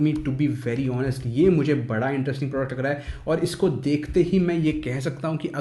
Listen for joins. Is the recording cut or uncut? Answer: uncut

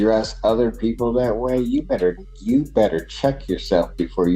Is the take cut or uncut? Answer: uncut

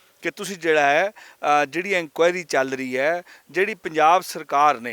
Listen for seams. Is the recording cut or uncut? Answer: uncut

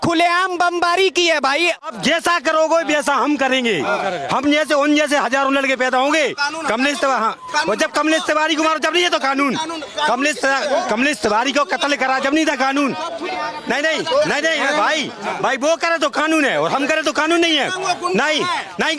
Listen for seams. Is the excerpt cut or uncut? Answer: cut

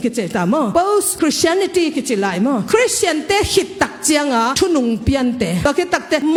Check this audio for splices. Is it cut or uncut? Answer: uncut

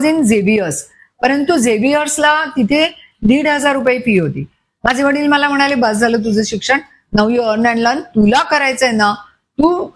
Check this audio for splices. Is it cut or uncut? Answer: uncut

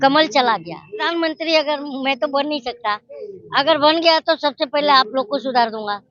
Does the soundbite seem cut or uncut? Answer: cut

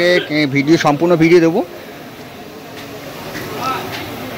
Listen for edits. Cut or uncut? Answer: uncut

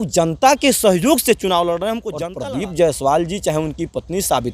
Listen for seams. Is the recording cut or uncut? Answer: cut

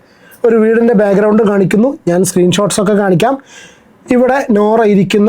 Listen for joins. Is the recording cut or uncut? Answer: uncut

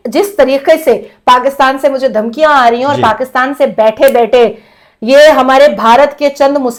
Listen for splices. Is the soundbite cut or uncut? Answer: uncut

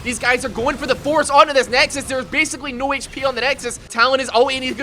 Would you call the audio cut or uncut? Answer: cut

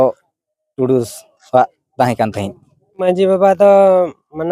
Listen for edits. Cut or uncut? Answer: cut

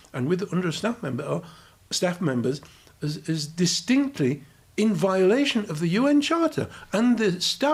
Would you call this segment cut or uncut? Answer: uncut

